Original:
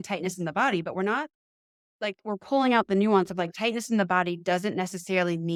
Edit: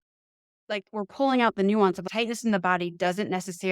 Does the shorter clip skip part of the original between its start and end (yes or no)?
yes